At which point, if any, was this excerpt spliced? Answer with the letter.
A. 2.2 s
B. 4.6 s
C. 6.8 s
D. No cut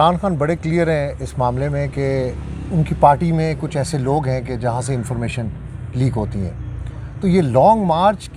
D